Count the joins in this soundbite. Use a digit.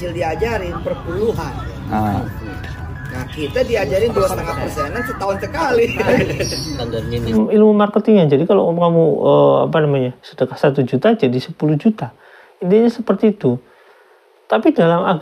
1